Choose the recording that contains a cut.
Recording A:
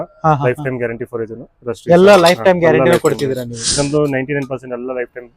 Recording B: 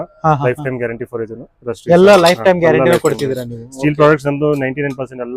A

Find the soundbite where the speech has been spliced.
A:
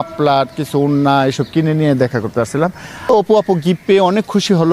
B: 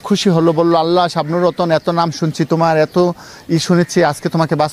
A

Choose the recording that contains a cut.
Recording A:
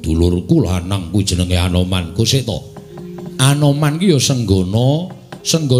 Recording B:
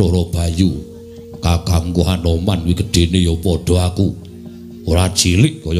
A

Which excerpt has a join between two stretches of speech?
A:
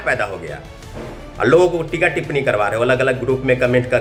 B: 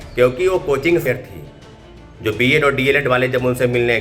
B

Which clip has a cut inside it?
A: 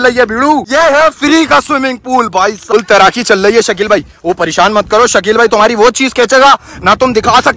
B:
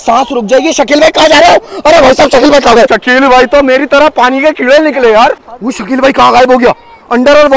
A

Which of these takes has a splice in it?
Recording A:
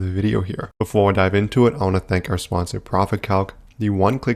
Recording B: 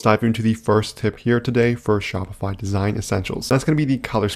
B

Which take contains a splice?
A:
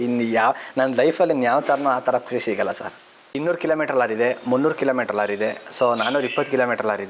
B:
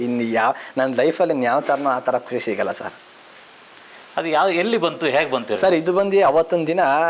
A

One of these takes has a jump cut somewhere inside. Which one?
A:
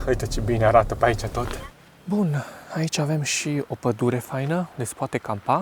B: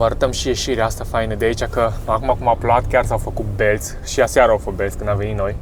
A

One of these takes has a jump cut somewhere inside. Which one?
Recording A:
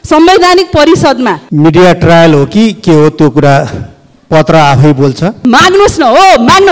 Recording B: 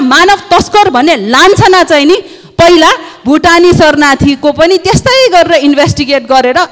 A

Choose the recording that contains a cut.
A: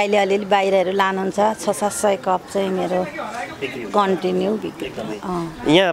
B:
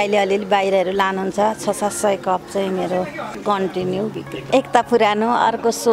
B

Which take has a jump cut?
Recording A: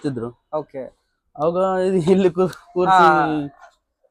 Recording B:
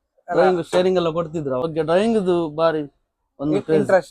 B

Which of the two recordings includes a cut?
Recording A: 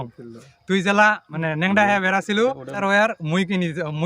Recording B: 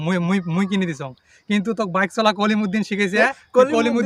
A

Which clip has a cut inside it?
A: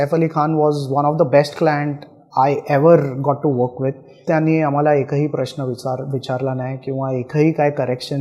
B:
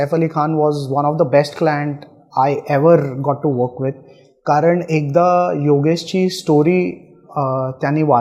A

